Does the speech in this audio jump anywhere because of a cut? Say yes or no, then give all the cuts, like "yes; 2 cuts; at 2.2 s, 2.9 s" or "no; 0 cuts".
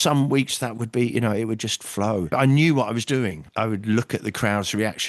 yes; 2 cuts; at 2.3 s, 3.4 s